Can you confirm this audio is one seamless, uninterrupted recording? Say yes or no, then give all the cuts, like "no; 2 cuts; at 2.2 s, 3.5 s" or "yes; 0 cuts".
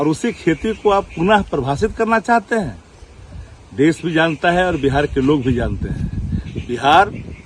yes; 0 cuts